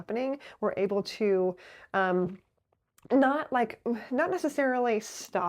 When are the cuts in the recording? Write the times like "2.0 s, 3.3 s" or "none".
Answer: none